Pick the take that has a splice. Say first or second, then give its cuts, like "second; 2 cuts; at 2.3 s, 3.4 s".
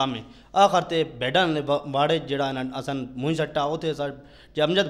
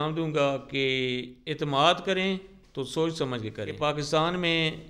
second; 2 cuts; at 1.4 s, 3.7 s